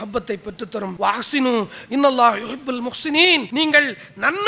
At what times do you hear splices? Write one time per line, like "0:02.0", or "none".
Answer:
0:00.9
0:03.5